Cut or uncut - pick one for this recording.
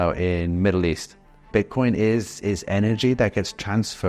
cut